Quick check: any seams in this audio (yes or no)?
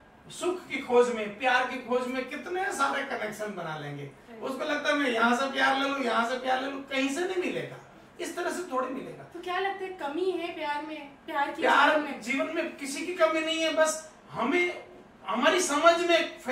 no